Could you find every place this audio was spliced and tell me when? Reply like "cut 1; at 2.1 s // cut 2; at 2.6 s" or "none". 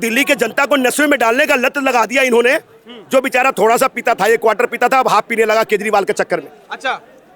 none